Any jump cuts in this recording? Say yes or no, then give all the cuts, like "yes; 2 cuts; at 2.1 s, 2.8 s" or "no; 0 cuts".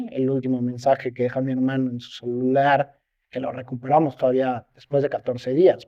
no; 0 cuts